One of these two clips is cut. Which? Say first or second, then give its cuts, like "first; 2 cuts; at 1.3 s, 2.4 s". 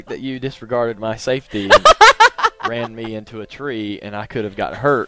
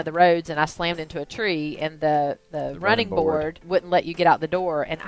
second; 1 cut; at 3.6 s